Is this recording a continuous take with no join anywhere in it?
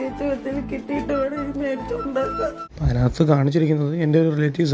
no; 1 cut; at 2.7 s

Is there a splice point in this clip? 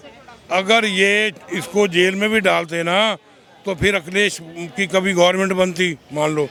no; 0 cuts

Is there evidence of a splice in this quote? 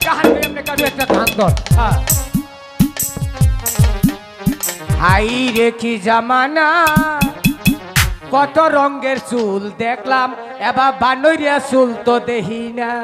no; 0 cuts

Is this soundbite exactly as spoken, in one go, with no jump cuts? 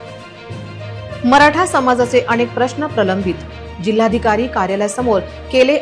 yes; 0 cuts

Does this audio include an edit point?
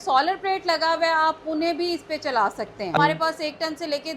yes; 1 cut; at 3.0 s

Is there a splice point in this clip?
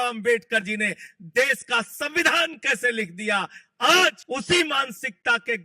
yes; 1 cut; at 4.2 s

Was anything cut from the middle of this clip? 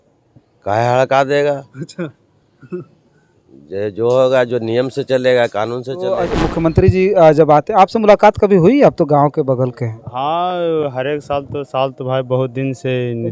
yes; 1 cut; at 5.9 s

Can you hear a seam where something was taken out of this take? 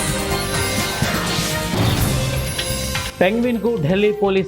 yes; 1 cut; at 3.1 s

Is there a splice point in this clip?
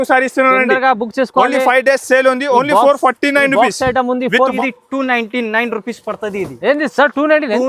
yes; 1 cut; at 4.6 s

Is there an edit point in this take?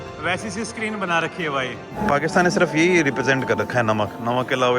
yes; 1 cut; at 2.0 s

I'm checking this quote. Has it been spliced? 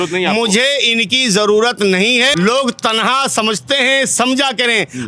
yes; 1 cut; at 2.3 s

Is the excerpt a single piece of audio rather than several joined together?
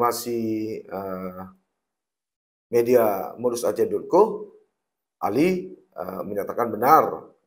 yes; 0 cuts

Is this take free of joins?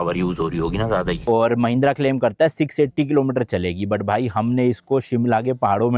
no; 1 cut; at 1.2 s

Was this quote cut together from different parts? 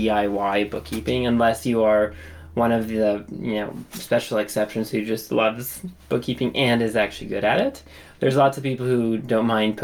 no; 0 cuts

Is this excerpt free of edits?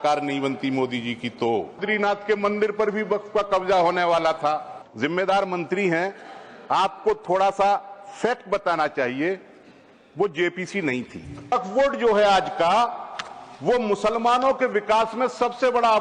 no; 3 cuts; at 1.8 s, 4.8 s, 11.5 s

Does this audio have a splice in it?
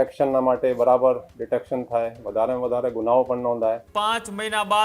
yes; 1 cut; at 3.9 s

